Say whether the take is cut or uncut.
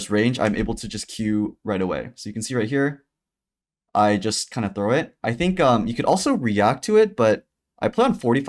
uncut